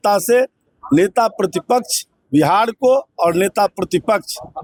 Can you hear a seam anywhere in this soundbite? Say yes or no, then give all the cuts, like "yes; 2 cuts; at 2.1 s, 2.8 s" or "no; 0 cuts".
no; 0 cuts